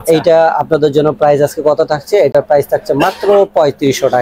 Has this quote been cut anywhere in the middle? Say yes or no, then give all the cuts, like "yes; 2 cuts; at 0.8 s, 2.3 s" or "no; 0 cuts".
no; 0 cuts